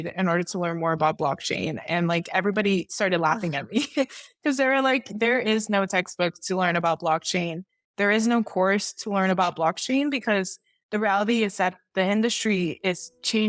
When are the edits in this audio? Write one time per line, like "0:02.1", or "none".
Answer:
none